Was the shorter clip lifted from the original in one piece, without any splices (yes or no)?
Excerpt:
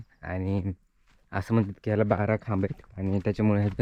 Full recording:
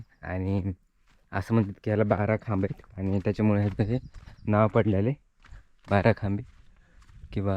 yes